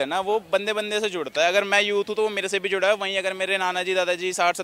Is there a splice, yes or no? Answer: no